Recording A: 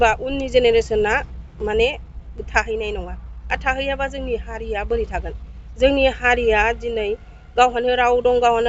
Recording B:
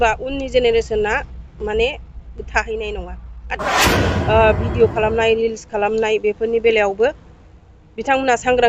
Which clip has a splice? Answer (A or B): B